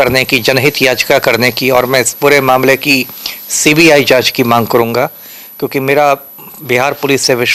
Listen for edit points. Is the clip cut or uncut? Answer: uncut